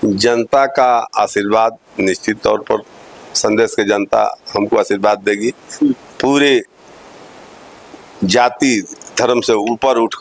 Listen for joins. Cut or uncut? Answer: uncut